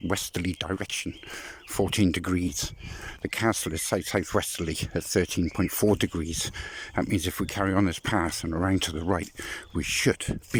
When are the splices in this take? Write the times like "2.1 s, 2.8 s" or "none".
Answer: none